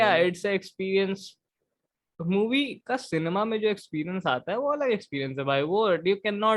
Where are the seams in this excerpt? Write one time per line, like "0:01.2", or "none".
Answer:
none